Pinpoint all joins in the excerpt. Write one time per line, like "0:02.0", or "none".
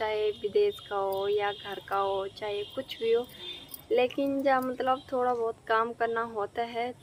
none